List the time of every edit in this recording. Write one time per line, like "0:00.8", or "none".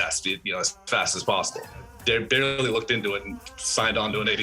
0:01.9